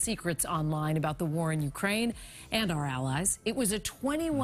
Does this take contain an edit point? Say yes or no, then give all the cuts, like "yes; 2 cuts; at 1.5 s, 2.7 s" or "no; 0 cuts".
no; 0 cuts